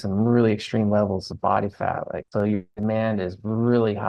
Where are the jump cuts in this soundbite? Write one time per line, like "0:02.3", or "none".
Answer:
0:02.2